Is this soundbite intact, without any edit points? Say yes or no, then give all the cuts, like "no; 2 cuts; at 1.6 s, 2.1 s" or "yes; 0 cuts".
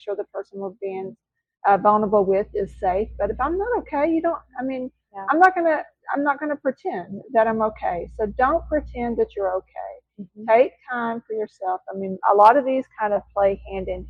yes; 0 cuts